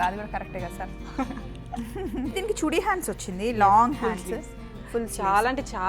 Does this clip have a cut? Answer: yes; 1 cut; at 2.3 s

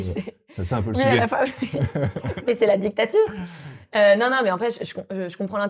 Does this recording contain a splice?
no; 0 cuts

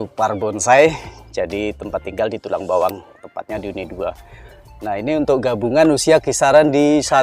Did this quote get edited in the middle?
no; 0 cuts

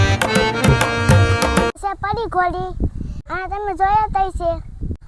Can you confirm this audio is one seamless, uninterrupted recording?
no; 1 cut; at 1.7 s

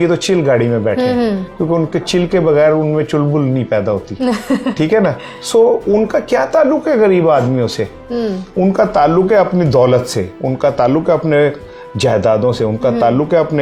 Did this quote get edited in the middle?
no; 0 cuts

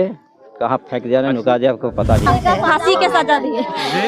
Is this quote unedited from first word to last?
no; 1 cut; at 2.3 s

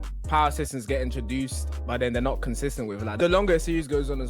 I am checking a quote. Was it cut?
yes; 1 cut; at 3.1 s

